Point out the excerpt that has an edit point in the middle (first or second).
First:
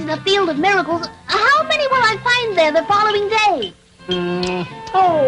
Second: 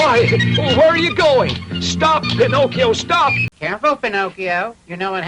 second